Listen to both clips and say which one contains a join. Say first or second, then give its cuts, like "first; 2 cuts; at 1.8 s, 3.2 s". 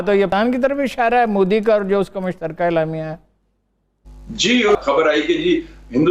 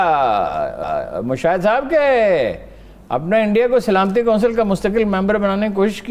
first; 1 cut; at 4.8 s